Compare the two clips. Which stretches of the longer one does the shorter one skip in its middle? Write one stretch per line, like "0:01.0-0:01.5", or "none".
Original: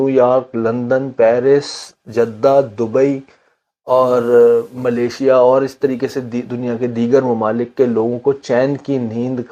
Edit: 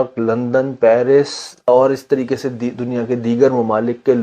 0:02.0-0:05.4